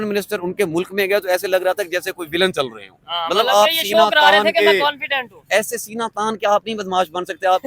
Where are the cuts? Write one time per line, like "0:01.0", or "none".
none